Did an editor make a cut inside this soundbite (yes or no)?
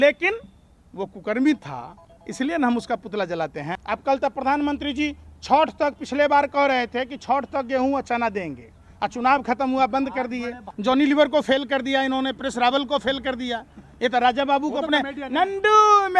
yes